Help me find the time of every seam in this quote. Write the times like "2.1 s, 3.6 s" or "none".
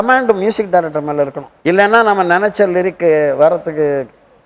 1.5 s